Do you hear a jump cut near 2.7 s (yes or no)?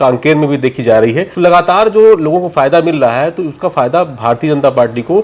no